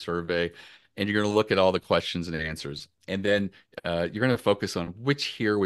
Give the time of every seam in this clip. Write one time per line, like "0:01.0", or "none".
0:02.9